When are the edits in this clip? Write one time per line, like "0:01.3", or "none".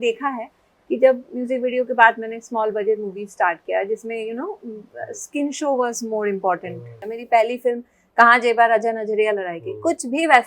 0:07.0